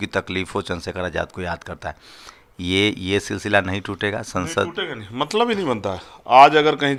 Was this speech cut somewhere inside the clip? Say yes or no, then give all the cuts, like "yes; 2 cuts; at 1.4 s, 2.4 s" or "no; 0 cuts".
no; 0 cuts